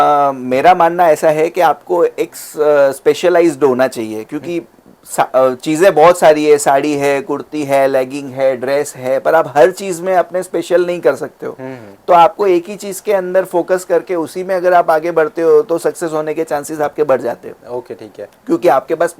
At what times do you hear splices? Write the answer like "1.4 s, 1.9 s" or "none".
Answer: none

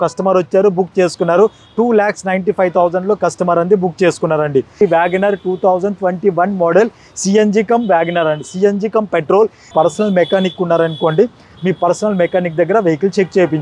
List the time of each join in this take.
4.8 s, 9.6 s

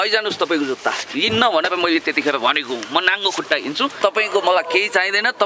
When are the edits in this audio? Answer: 3.9 s

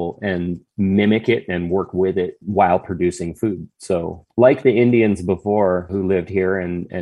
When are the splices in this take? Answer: none

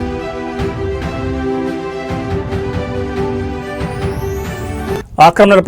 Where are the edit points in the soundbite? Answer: 4.8 s

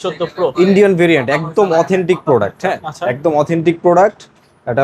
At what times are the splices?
none

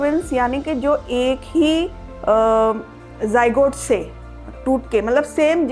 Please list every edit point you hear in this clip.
none

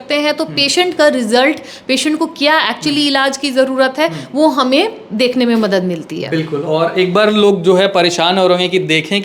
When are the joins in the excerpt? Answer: none

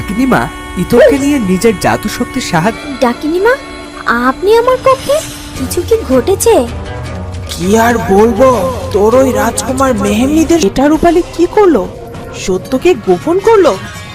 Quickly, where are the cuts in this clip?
2.8 s, 10.6 s

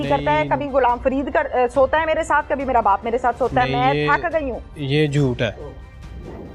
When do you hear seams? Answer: none

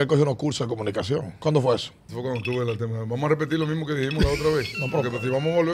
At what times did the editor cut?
1.3 s, 2.0 s

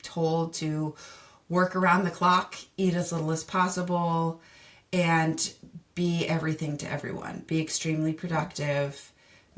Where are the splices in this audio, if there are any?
none

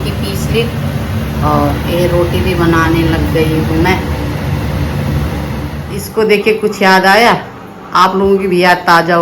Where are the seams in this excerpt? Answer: 5.8 s

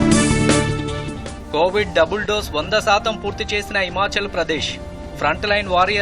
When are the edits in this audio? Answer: 1.1 s

